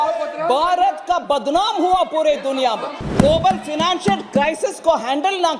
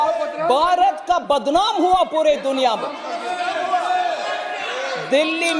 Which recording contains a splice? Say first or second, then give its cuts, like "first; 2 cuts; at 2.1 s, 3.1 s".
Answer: first; 1 cut; at 3.0 s